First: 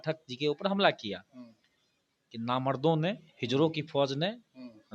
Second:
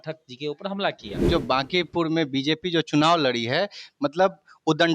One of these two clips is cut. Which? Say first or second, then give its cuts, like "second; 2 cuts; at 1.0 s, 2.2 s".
second; 1 cut; at 1.2 s